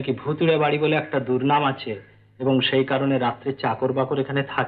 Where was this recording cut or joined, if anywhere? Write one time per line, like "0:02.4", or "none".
none